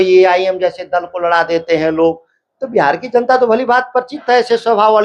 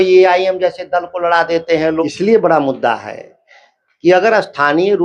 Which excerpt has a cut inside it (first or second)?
second